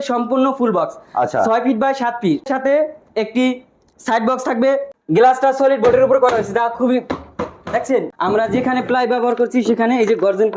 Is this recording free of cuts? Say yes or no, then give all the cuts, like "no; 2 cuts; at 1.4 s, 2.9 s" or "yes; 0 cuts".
no; 3 cuts; at 2.5 s, 4.9 s, 8.1 s